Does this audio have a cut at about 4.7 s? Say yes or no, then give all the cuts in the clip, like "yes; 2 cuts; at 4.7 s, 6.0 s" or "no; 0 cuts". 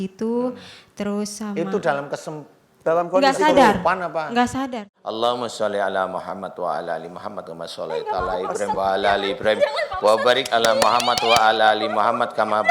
yes; 1 cut; at 4.7 s